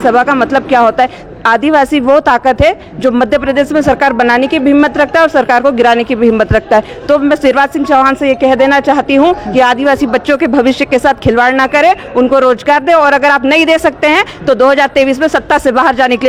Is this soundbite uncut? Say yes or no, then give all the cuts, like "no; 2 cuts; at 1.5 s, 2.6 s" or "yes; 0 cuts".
yes; 0 cuts